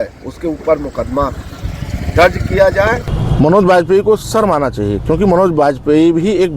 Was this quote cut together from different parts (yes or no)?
yes